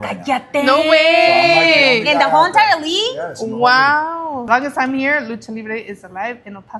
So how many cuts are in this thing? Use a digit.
1